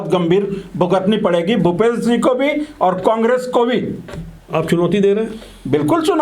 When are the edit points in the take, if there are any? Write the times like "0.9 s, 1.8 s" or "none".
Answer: none

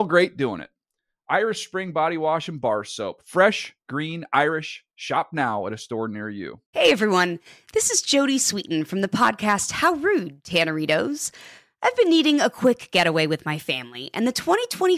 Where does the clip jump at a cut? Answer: 6.6 s

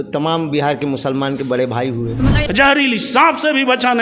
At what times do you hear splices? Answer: 2.4 s

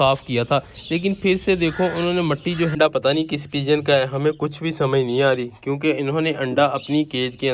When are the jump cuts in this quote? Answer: 2.7 s

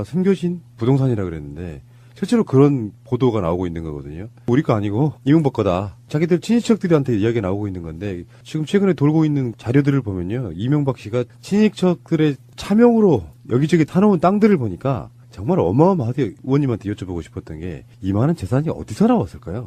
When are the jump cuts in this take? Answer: 11.2 s

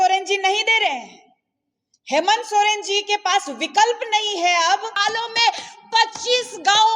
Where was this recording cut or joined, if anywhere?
5.0 s

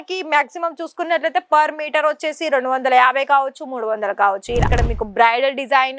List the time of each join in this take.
4.7 s

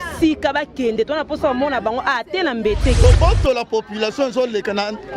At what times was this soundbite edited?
3.0 s

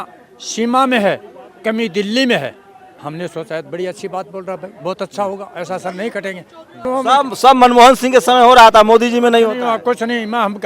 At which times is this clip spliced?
6.8 s

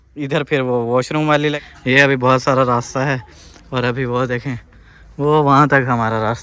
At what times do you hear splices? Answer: 1.6 s

